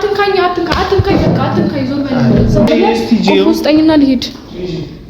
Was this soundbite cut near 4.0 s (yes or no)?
no